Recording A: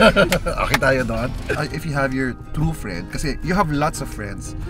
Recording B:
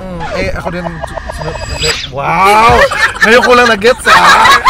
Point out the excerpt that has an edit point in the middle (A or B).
A